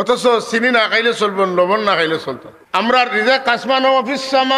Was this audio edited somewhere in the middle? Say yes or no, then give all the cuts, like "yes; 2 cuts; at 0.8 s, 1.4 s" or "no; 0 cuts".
yes; 1 cut; at 2.5 s